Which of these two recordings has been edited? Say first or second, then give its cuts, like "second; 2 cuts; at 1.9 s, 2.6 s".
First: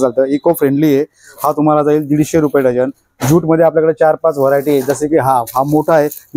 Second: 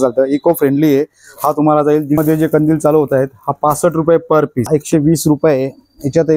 second; 2 cuts; at 2.2 s, 4.7 s